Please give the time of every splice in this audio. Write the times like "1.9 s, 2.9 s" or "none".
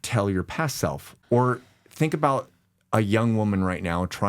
1.1 s